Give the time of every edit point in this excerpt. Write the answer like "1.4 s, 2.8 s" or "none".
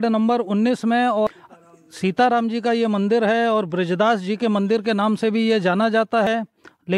1.3 s, 6.3 s